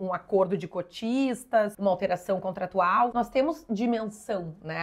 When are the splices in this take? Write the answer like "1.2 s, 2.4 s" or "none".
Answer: 1.7 s, 3.1 s